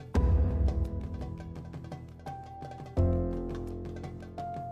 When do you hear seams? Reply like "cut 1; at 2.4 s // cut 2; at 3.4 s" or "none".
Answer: cut 1; at 1.7 s